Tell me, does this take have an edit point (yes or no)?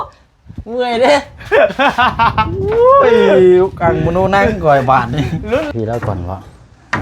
yes